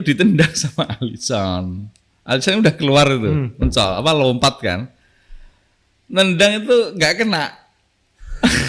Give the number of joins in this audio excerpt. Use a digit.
0